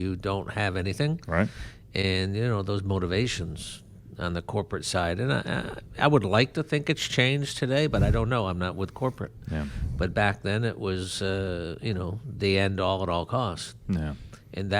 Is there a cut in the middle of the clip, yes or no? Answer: no